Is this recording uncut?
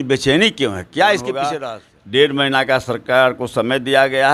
no; 1 cut; at 1.6 s

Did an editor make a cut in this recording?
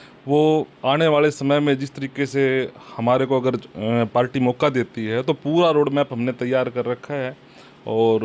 no; 0 cuts

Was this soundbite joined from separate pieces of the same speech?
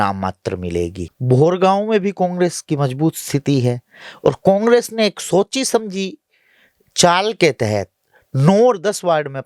yes; 1 cut; at 1.1 s

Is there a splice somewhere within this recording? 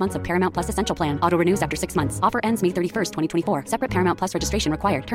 no; 0 cuts

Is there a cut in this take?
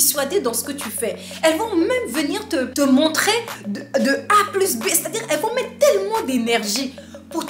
yes; 1 cut; at 2.7 s

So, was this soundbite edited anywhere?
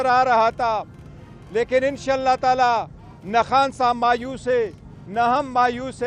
no; 0 cuts

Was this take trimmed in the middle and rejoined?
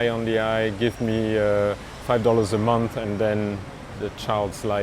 yes; 2 cuts; at 1.9 s, 3.9 s

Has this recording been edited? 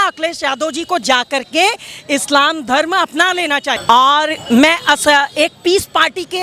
no; 0 cuts

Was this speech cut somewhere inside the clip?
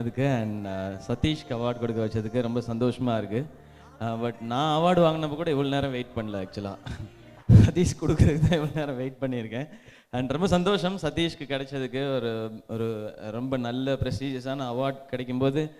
yes; 1 cut; at 3.6 s

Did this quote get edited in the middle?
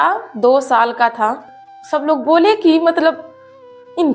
yes; 1 cut; at 1.5 s

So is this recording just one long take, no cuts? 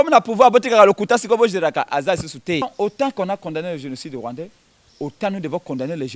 no; 1 cut; at 2.6 s

